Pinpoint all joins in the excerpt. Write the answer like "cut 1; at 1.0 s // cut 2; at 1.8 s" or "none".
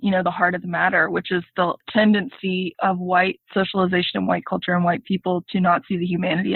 none